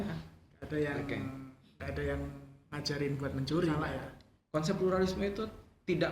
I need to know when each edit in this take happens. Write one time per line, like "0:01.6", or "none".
0:03.9

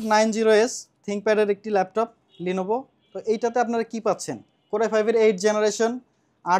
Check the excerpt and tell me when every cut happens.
none

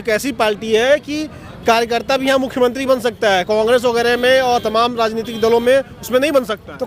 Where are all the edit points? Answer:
none

